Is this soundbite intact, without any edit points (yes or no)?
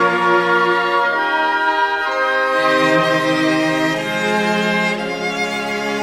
no